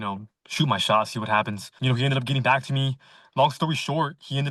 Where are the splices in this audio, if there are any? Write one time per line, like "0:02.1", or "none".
0:01.7